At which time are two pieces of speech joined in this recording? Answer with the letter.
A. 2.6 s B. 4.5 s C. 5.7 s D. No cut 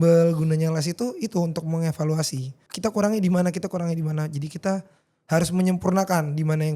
A